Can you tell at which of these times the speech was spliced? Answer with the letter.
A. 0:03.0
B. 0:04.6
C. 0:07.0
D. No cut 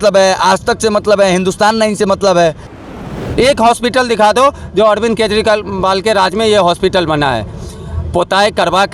A